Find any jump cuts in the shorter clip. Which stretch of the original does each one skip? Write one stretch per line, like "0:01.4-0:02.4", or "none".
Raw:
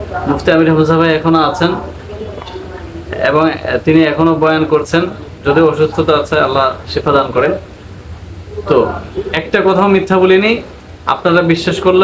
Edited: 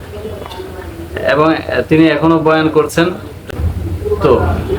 0:05.3-0:07.8